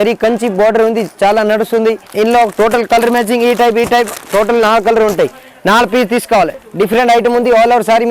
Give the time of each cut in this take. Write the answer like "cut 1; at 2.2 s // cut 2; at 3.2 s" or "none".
cut 1; at 2.1 s // cut 2; at 6.6 s